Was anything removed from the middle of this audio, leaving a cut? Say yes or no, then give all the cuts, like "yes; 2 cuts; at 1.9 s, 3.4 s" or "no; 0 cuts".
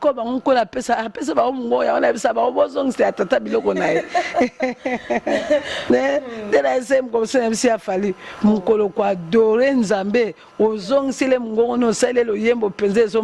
no; 0 cuts